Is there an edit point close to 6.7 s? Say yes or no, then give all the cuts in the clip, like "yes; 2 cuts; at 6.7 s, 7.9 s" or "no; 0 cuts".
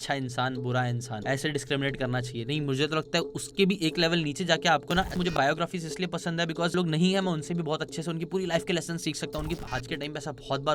yes; 4 cuts; at 1.1 s, 5.3 s, 6.7 s, 9.4 s